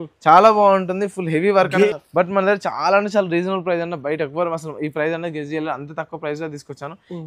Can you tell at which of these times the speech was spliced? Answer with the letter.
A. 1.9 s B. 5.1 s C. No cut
A